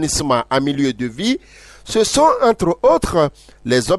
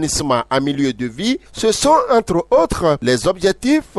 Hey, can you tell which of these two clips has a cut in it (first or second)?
second